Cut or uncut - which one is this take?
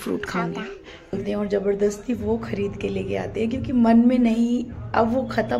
cut